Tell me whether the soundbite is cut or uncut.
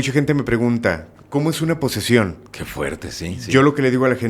cut